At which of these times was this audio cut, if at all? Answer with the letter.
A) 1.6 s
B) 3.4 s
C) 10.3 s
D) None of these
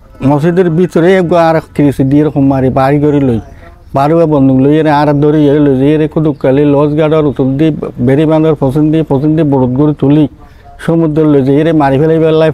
D